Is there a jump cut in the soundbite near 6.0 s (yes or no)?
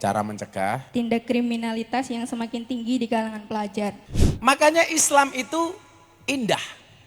no